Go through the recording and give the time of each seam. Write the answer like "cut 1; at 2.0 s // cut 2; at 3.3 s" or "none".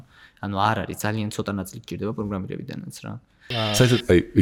cut 1; at 3.5 s